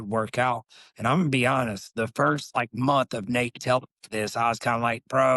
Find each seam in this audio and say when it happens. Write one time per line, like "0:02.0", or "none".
0:01.8